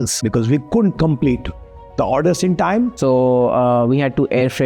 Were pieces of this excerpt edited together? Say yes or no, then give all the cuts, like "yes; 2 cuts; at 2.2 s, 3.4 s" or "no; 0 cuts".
yes; 1 cut; at 2.9 s